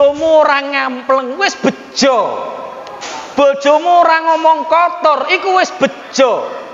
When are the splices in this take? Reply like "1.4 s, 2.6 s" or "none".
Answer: none